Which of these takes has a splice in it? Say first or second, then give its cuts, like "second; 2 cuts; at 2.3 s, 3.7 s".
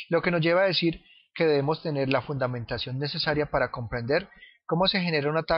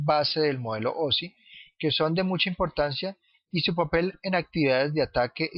second; 1 cut; at 1.7 s